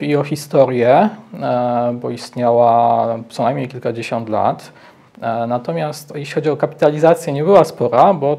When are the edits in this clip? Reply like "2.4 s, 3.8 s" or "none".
none